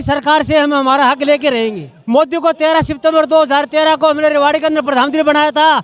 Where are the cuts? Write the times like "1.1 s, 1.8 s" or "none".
1.9 s

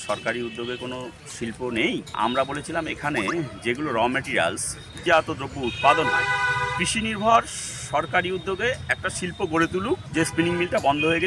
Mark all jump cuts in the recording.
2.2 s, 5.0 s, 10.1 s

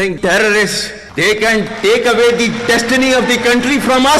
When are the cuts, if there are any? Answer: none

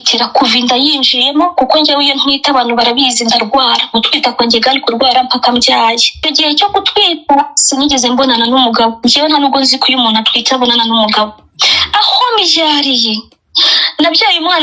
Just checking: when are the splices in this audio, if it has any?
6.1 s

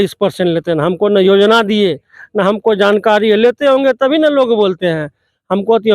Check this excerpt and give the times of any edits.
none

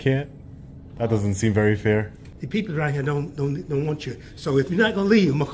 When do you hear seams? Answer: 2.2 s

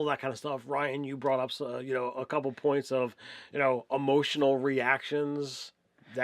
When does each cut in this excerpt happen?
1.7 s

